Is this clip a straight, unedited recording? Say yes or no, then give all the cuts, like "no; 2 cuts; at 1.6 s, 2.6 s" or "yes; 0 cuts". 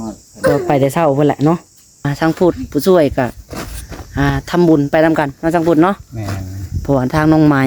no; 1 cut; at 2.1 s